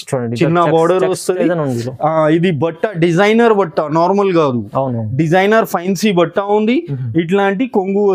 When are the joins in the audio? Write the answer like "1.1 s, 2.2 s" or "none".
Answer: none